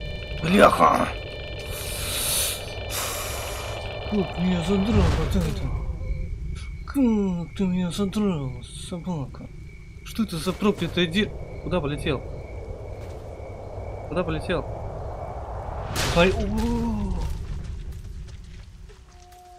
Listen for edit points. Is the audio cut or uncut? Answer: uncut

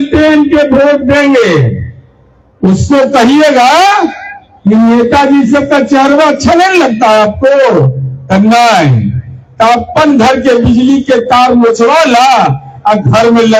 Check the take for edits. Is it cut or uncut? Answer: uncut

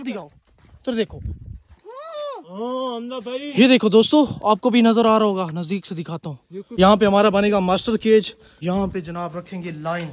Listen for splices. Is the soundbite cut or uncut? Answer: cut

